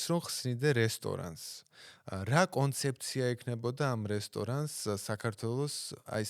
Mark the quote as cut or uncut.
uncut